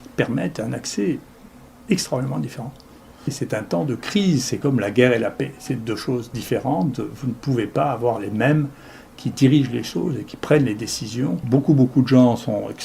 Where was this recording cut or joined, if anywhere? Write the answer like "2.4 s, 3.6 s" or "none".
3.3 s, 11.4 s